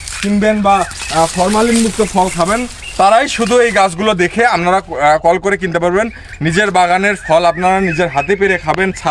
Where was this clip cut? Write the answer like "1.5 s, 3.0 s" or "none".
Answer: none